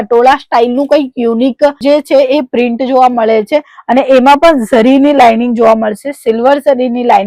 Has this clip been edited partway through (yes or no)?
no